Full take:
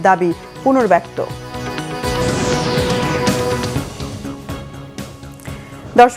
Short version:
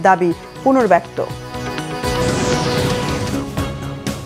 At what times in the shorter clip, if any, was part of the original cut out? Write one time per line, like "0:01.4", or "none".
0:03.1